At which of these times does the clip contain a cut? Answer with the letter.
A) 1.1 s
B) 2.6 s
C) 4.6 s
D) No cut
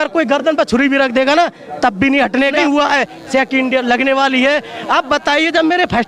B